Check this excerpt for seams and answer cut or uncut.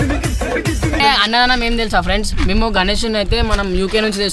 cut